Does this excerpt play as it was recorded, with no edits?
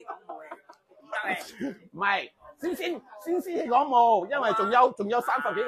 yes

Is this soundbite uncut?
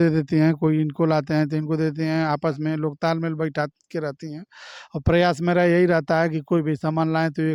yes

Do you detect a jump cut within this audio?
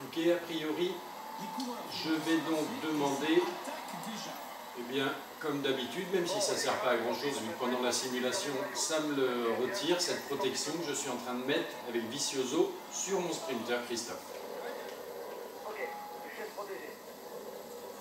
yes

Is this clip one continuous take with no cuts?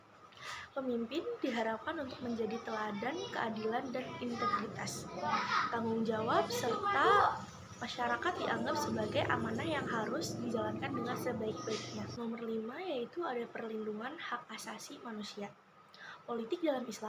no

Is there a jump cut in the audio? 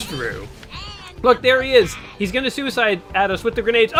no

